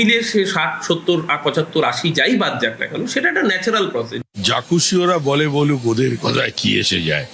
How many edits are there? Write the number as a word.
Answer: one